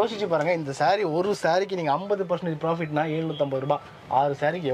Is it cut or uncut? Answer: uncut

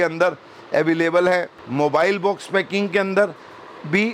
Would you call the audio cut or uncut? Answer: cut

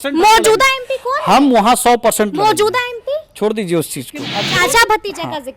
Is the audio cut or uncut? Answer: cut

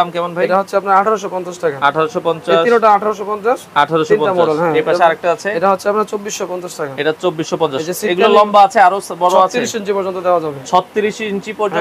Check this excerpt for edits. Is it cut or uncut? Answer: uncut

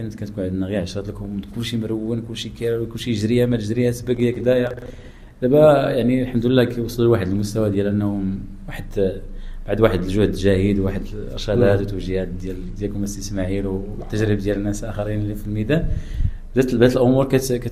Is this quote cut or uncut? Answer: uncut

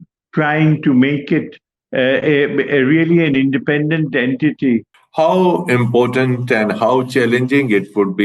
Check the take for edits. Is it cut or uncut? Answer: cut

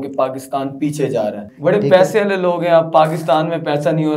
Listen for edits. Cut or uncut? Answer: cut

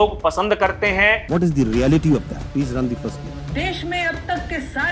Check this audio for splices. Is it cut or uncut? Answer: cut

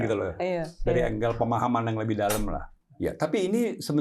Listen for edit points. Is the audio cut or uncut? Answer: cut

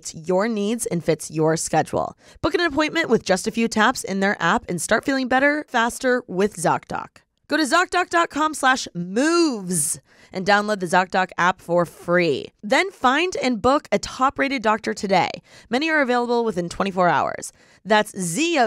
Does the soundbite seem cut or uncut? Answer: uncut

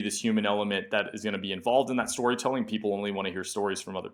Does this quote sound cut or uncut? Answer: uncut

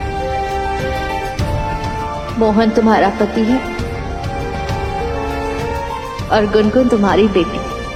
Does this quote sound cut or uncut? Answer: uncut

